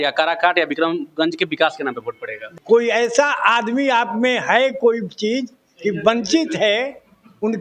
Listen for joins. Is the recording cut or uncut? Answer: uncut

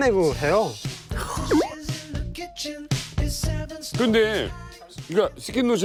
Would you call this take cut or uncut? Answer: uncut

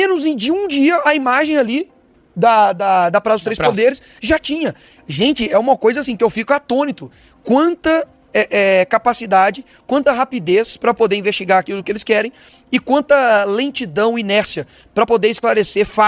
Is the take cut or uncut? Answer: uncut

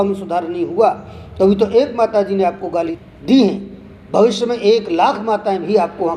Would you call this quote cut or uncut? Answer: cut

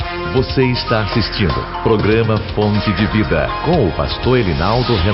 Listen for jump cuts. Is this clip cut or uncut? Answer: uncut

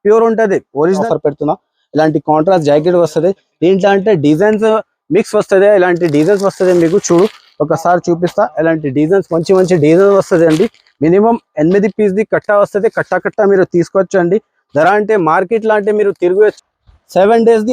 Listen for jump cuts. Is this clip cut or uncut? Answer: cut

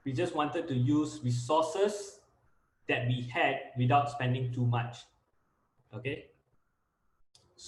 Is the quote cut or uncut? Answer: uncut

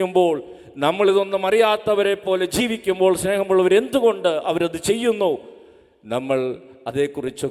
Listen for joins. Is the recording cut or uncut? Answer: uncut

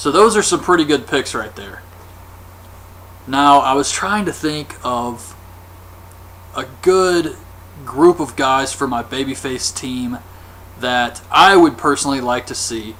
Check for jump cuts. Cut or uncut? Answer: uncut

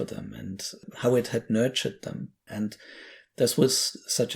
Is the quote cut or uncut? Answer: cut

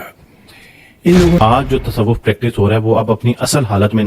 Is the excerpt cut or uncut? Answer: cut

